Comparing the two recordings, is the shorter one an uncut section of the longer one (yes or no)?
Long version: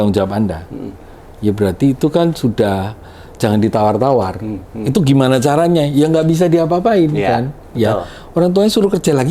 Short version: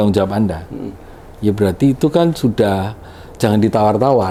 yes